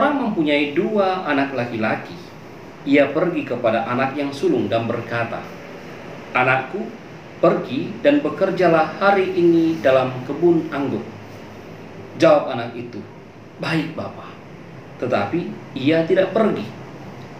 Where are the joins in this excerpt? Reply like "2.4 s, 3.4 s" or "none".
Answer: none